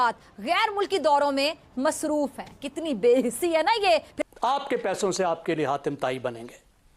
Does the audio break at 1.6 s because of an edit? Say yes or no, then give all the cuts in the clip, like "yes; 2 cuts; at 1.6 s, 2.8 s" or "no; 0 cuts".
no; 1 cut; at 4.2 s